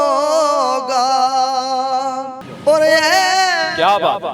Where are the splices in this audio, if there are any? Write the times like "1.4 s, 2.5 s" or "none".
none